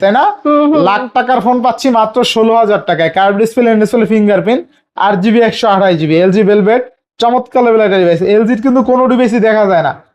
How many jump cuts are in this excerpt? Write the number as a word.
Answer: zero